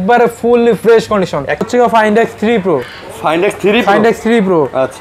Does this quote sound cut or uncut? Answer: cut